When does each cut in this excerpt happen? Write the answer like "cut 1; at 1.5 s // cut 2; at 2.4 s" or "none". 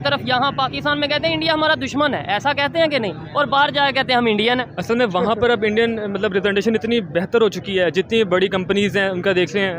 none